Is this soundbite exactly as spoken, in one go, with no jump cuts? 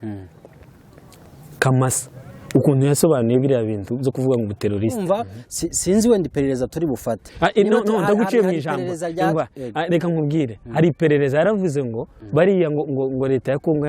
no; 1 cut; at 5.0 s

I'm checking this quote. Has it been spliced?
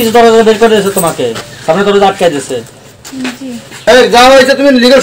yes; 1 cut; at 3.7 s

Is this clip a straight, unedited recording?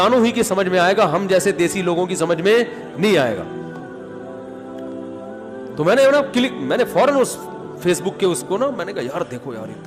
no; 2 cuts; at 3.9 s, 5.4 s

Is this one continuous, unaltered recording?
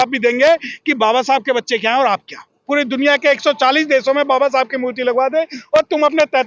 no; 1 cut; at 2.6 s

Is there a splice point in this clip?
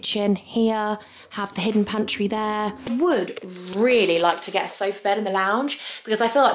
yes; 1 cut; at 2.9 s

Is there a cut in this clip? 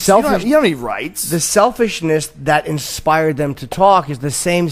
no; 0 cuts

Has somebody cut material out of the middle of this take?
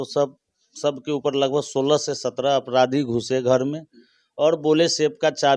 no; 0 cuts

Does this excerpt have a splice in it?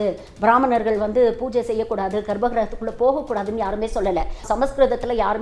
yes; 1 cut; at 4.4 s

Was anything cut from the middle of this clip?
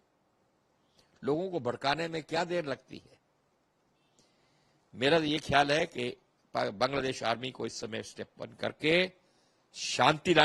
no; 0 cuts

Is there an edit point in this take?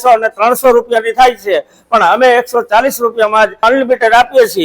yes; 1 cut; at 3.6 s

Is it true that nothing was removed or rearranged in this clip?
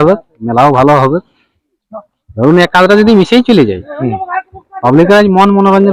yes; 0 cuts

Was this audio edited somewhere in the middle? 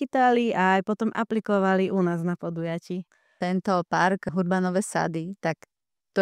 yes; 2 cuts; at 3.4 s, 4.3 s

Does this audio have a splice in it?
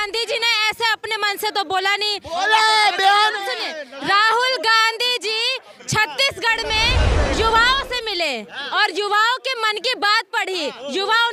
no; 0 cuts

